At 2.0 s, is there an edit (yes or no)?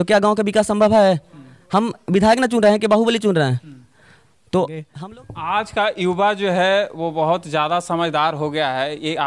no